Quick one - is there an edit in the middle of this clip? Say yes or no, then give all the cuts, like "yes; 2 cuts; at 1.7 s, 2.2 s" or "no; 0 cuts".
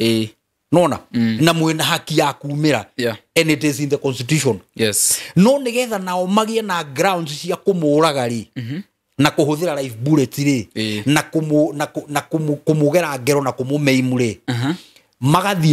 no; 0 cuts